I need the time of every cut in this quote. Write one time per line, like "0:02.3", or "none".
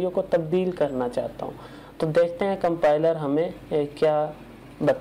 none

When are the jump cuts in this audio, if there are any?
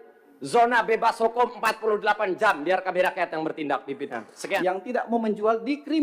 0:04.6

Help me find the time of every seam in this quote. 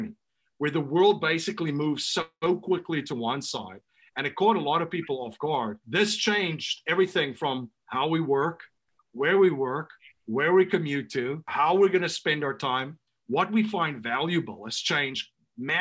0:05.8
0:11.4

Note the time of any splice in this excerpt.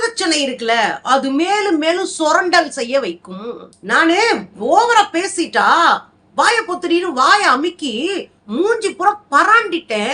0:03.7

